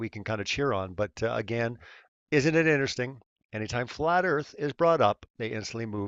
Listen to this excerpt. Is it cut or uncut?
uncut